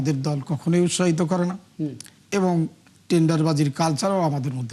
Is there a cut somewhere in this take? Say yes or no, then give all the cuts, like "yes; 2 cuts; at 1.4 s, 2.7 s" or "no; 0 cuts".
no; 0 cuts